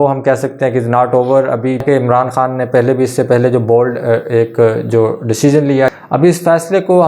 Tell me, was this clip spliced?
yes; 2 cuts; at 1.8 s, 6.0 s

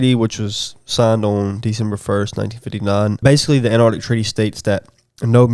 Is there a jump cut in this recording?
yes; 1 cut; at 3.2 s

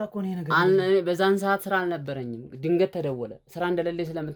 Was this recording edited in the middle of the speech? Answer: no; 0 cuts

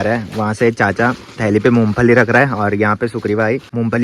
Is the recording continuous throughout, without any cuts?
yes; 0 cuts

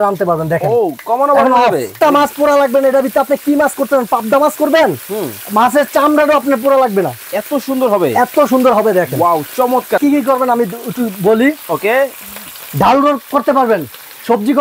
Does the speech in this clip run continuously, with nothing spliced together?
no; 2 cuts; at 1.9 s, 10.0 s

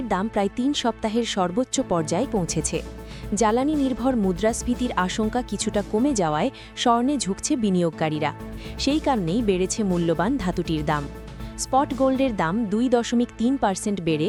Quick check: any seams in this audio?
no; 0 cuts

